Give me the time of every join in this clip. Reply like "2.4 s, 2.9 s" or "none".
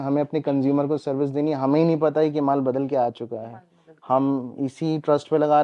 none